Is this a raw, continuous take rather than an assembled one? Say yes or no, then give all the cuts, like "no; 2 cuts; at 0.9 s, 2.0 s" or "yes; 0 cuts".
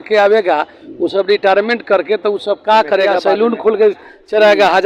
no; 1 cut; at 3.2 s